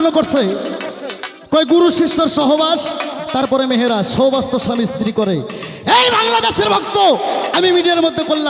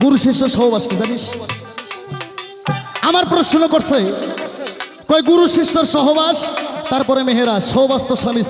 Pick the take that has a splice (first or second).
second